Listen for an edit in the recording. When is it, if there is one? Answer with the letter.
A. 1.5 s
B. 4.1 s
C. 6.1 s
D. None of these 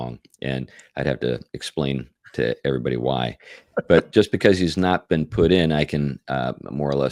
D